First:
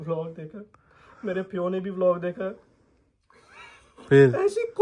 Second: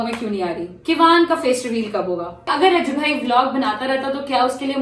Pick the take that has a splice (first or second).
second